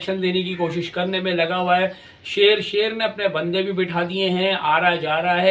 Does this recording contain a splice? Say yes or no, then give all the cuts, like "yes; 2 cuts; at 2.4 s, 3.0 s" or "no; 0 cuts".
no; 0 cuts